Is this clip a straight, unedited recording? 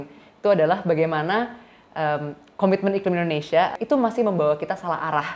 no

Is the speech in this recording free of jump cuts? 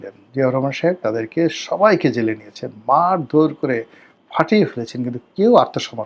yes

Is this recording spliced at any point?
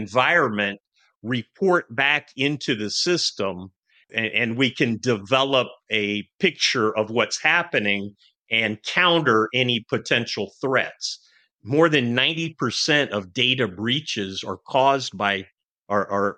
yes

